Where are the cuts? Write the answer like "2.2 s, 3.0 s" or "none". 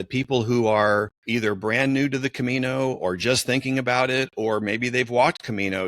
1.2 s

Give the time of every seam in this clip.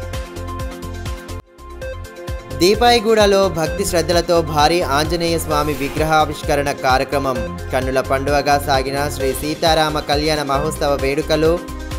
1.0 s

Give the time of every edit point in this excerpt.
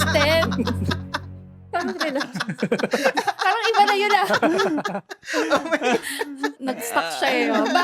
6.6 s

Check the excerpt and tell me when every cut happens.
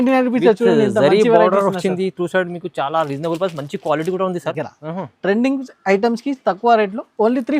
4.7 s

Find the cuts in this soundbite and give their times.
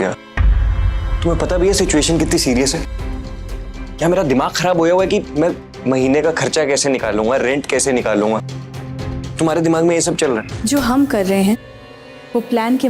10.5 s

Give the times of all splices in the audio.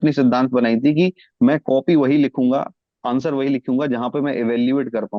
none

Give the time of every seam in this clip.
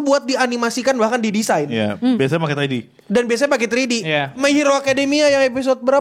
none

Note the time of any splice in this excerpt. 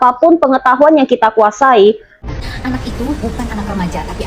2.1 s

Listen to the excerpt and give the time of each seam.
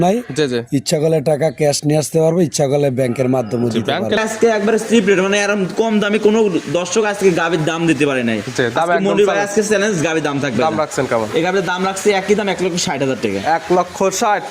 4.2 s

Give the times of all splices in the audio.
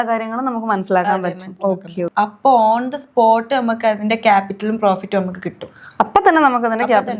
2.1 s

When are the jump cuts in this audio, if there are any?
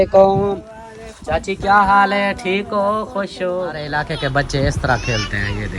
4.0 s

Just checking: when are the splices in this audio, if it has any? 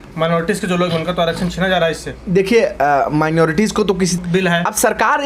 4.2 s

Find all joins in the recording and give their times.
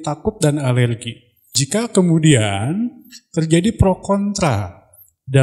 1.5 s

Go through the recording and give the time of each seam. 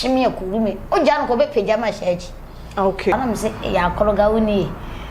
3.1 s

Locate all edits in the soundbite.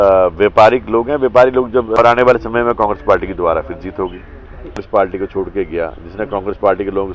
2.0 s, 4.8 s

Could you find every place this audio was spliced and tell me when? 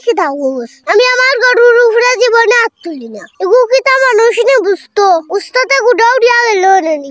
none

